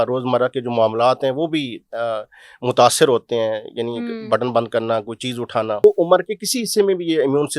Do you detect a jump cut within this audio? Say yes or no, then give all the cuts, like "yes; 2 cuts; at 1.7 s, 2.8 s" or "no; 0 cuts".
yes; 1 cut; at 5.8 s